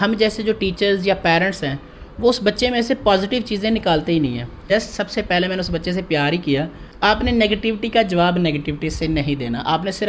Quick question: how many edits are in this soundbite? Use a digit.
2